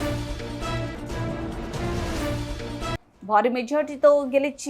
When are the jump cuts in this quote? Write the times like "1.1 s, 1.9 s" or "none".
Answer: 3.1 s